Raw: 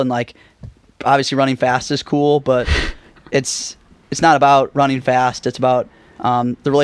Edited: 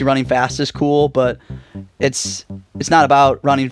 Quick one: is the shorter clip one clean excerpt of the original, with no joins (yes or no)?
yes